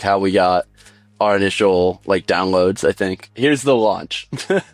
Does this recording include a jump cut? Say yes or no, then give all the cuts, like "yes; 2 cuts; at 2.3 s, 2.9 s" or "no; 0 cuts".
yes; 1 cut; at 3.2 s